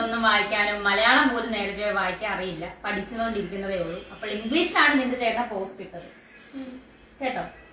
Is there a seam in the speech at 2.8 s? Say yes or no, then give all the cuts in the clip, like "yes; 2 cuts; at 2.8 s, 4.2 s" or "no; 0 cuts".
no; 0 cuts